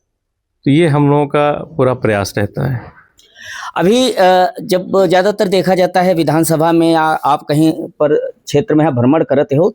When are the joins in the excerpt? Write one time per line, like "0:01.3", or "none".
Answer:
none